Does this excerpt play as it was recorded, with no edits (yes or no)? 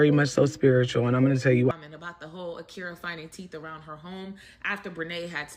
no